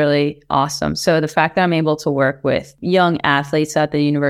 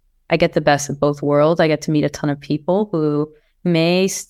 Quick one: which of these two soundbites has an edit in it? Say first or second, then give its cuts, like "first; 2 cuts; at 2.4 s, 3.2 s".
first; 1 cut; at 2.7 s